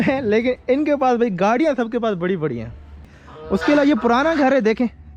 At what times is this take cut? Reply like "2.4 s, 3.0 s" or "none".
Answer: 3.1 s